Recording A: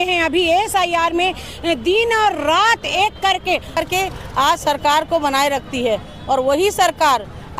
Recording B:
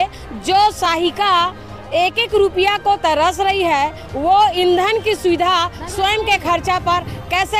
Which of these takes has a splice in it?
A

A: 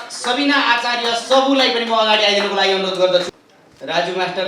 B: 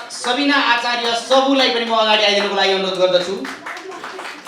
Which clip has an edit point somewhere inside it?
A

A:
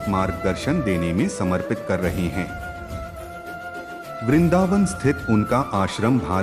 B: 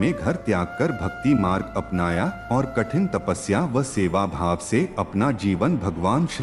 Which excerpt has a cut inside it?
A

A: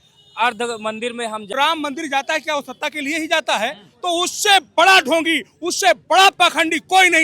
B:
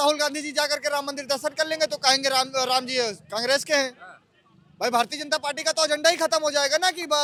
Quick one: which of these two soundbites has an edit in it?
A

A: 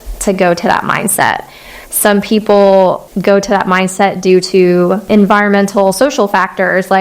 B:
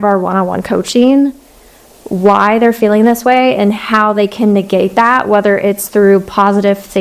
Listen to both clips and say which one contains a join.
A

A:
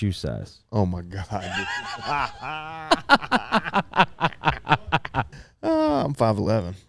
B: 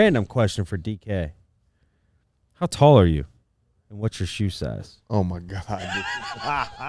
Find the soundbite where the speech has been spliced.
A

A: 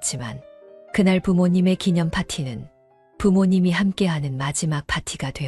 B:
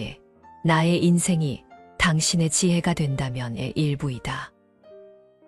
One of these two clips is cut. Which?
B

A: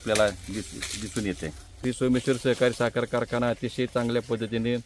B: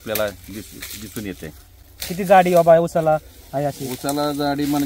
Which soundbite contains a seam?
A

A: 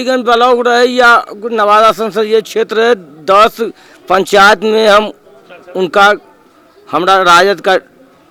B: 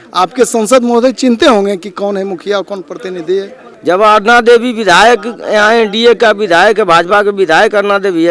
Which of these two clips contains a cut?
B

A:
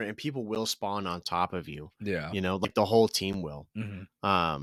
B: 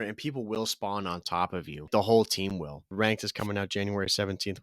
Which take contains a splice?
B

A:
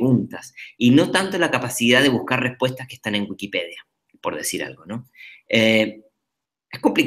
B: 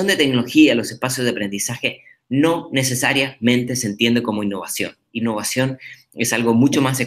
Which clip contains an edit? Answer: A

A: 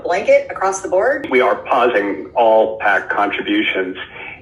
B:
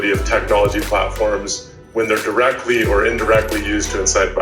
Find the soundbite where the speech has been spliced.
A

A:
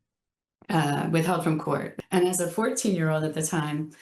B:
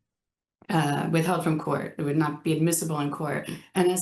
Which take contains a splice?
A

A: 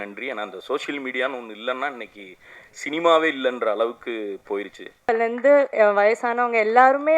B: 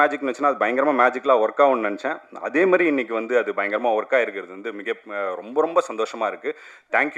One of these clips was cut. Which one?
A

